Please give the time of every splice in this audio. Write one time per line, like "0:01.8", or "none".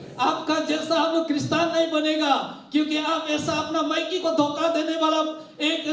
none